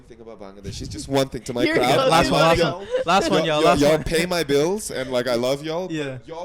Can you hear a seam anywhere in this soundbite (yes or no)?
no